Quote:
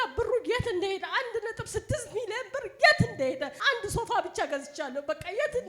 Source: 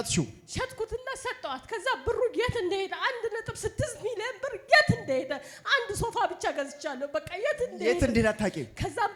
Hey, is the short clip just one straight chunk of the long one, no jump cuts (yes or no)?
no